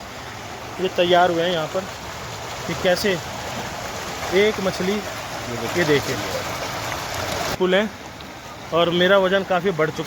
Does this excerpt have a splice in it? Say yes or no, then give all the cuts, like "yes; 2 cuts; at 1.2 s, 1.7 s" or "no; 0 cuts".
yes; 1 cut; at 7.6 s